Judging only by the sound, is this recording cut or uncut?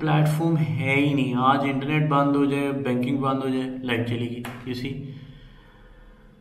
uncut